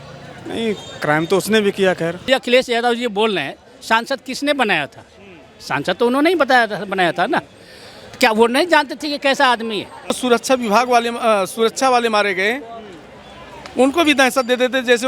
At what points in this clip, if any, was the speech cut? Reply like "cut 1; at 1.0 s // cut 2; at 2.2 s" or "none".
cut 1; at 2.3 s // cut 2; at 10.2 s